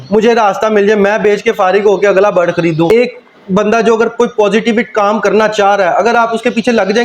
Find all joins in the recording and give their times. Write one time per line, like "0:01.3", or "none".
0:02.9